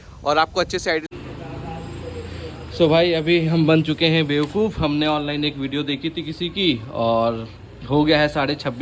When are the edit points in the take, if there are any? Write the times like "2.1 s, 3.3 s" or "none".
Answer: 1.1 s

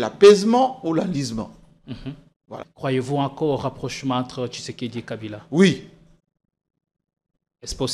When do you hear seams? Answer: 2.6 s

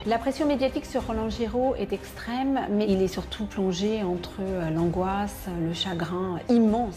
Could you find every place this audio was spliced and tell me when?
none

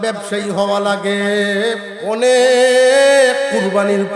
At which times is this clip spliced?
1.9 s

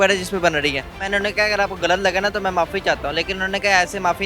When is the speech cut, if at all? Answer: 0.9 s

